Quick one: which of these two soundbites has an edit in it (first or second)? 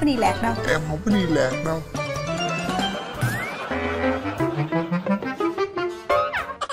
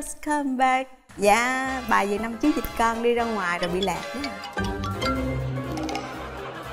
second